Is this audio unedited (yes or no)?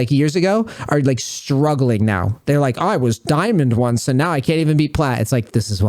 yes